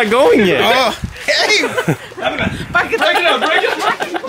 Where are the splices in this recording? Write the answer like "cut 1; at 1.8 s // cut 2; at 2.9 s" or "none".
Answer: cut 1; at 3.0 s